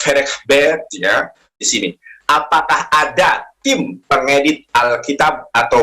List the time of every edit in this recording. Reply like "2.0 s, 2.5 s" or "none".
1.6 s